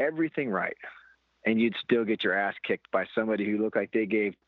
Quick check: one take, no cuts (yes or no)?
yes